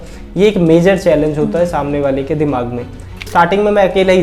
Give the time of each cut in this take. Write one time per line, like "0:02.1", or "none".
0:03.3